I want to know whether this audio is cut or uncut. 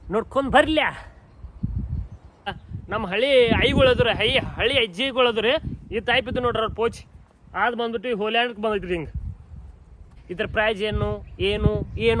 cut